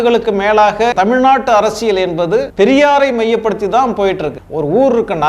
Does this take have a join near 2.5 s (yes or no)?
yes